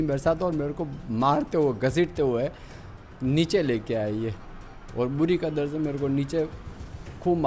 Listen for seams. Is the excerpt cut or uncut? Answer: uncut